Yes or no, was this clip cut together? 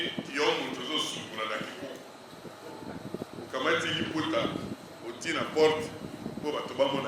no